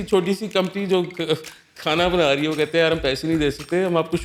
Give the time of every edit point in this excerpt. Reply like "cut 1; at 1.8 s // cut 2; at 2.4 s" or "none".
none